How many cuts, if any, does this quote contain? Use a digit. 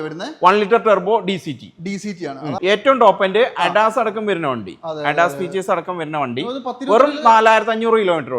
1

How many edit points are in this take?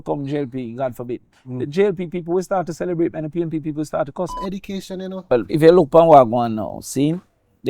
1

